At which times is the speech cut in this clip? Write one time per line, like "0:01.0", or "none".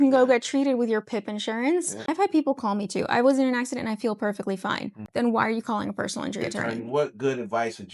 0:02.1
0:05.0
0:06.6